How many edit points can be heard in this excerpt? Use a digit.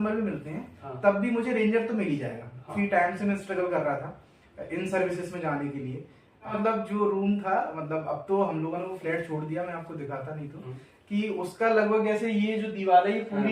2